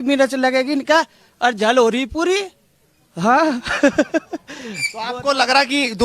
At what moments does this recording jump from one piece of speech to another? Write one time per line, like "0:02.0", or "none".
none